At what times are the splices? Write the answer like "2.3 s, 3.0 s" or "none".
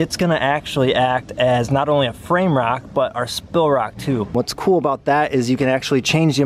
4.3 s